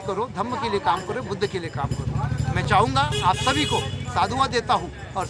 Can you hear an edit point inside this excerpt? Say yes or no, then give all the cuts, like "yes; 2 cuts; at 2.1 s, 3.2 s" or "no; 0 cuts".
no; 0 cuts